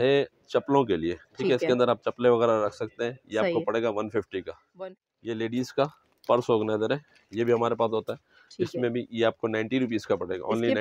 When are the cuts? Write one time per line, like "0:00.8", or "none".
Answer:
0:04.7